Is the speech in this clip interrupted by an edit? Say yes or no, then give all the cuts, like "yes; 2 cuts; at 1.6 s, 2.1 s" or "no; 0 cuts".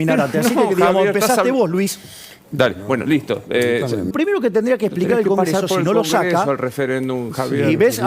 yes; 1 cut; at 4.1 s